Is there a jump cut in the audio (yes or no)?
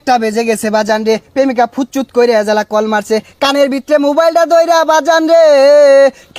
no